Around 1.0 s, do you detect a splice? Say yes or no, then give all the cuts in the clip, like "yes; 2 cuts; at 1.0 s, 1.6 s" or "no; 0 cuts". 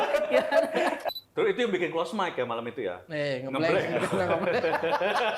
yes; 1 cut; at 1.0 s